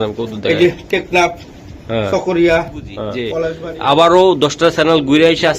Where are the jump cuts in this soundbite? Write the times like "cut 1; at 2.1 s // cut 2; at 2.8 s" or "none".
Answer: cut 1; at 3.2 s